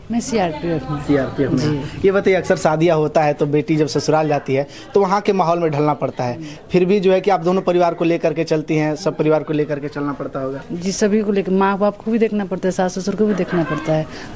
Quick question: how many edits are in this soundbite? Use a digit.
0